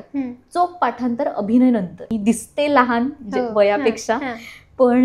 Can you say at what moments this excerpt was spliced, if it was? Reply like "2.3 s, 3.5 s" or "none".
2.0 s